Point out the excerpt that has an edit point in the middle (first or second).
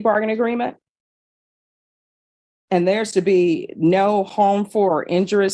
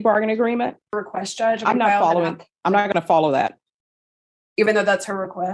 second